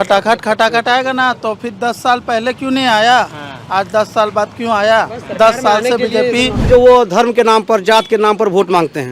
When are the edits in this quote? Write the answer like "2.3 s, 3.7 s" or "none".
6.7 s